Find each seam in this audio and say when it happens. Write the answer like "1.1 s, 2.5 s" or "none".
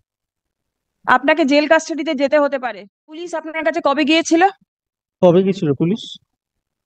3.4 s